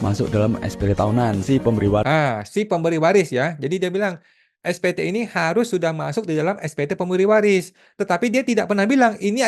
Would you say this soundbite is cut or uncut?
uncut